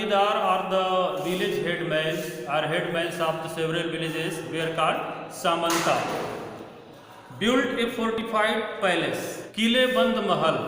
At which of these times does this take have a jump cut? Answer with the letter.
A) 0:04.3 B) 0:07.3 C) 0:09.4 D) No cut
C